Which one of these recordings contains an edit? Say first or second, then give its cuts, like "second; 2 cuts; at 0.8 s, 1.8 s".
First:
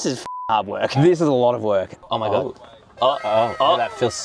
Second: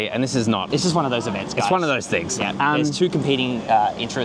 first; 1 cut; at 2.0 s